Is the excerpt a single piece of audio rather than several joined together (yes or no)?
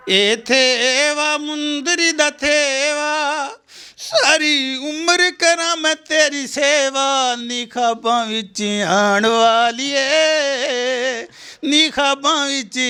yes